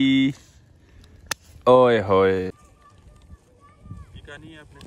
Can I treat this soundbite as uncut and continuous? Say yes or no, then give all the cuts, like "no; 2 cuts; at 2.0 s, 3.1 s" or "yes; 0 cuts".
no; 1 cut; at 2.5 s